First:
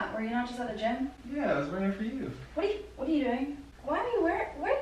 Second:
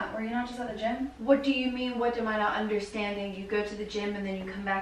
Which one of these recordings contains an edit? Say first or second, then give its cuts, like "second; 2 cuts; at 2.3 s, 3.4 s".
second; 1 cut; at 1.1 s